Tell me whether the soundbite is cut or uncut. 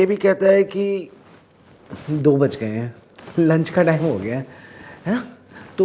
uncut